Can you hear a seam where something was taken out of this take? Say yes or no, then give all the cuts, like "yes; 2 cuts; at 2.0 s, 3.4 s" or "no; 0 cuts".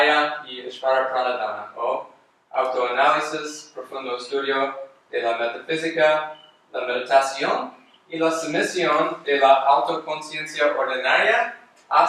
yes; 1 cut; at 4.9 s